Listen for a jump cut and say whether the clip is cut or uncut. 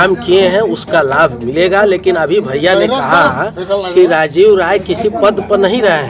uncut